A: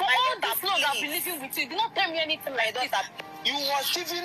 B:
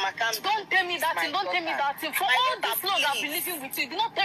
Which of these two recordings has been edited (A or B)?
A